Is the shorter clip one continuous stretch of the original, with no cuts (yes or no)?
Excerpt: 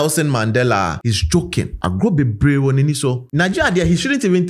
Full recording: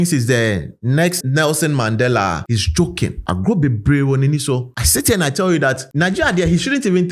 no